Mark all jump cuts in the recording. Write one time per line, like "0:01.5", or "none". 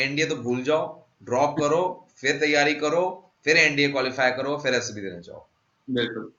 none